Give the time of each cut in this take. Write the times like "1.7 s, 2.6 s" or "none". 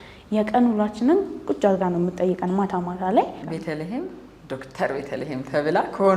3.5 s